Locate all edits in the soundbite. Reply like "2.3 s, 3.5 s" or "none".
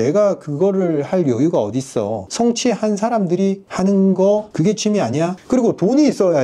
none